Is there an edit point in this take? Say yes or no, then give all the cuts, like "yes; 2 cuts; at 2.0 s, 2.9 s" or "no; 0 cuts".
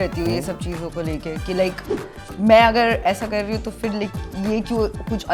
no; 0 cuts